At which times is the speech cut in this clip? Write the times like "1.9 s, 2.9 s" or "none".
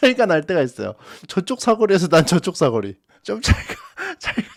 none